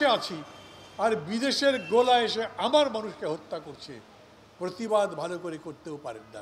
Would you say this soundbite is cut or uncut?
uncut